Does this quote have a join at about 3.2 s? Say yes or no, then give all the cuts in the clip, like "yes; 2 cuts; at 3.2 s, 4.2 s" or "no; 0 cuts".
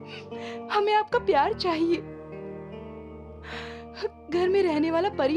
no; 0 cuts